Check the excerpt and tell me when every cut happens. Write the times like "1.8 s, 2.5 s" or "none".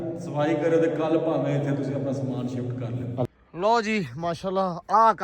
3.2 s